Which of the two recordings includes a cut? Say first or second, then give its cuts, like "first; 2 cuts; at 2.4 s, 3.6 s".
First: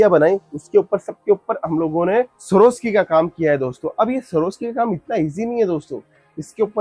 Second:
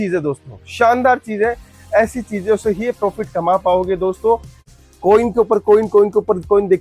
second; 1 cut; at 4.7 s